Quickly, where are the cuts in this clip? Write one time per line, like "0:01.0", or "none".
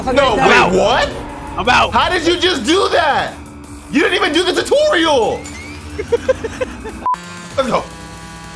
0:07.0